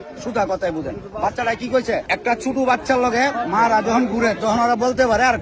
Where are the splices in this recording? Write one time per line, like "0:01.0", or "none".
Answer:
0:02.1

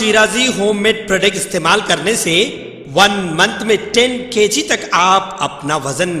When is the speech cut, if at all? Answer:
none

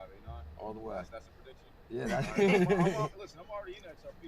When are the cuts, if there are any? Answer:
0:02.7

